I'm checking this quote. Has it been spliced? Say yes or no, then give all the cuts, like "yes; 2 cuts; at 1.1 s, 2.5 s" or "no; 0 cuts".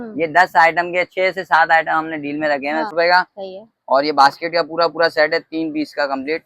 yes; 1 cut; at 2.9 s